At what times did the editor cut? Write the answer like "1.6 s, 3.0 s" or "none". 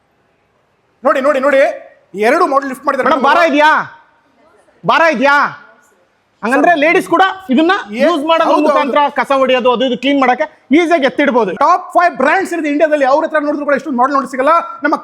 11.5 s